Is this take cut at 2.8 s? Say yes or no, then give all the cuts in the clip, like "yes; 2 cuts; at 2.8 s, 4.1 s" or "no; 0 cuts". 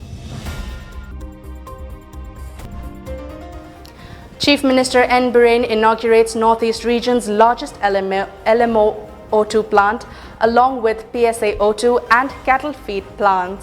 no; 1 cut; at 1.1 s